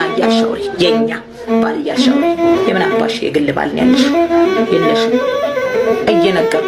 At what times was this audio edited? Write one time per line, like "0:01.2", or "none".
none